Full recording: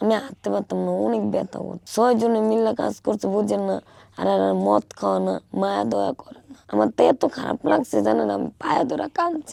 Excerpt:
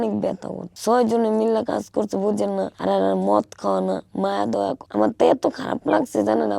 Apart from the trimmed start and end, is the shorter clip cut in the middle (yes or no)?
yes